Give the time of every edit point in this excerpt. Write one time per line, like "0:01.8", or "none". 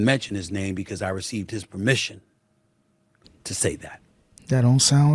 none